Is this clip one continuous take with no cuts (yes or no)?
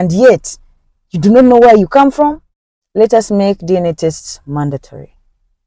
no